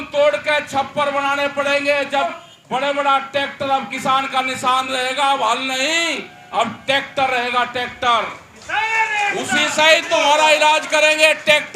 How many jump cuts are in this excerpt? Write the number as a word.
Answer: one